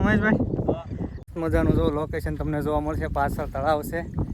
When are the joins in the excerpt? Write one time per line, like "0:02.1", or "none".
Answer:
0:01.3